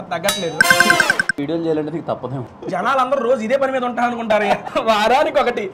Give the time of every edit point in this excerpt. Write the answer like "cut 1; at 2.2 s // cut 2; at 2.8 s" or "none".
cut 1; at 1.3 s // cut 2; at 2.5 s